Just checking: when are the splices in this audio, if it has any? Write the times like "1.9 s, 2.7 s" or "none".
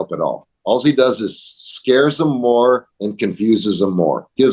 none